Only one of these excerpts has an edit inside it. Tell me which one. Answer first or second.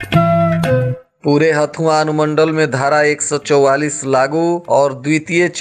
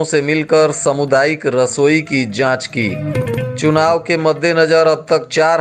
first